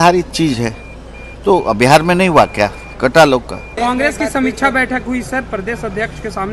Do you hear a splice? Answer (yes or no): yes